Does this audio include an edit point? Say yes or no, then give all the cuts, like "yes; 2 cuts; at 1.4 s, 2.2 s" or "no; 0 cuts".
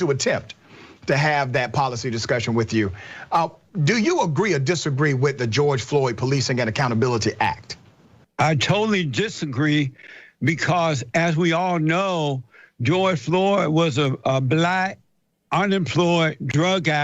no; 0 cuts